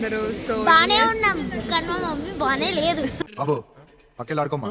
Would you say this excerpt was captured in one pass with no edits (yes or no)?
yes